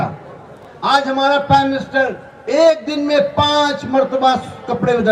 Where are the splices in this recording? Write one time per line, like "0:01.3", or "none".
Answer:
none